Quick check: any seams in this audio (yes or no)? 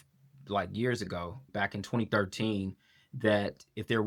no